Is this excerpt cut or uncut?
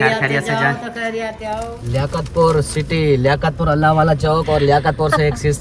cut